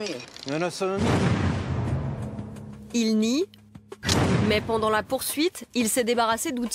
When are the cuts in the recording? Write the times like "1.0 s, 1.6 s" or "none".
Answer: 4.5 s